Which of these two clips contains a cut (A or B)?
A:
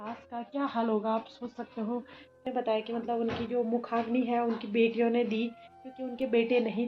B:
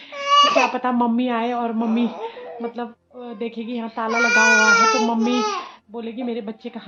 A